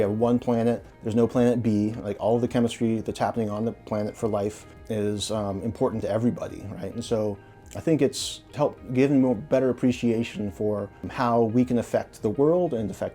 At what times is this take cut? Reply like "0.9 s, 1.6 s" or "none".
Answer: 0.9 s, 4.7 s, 11.0 s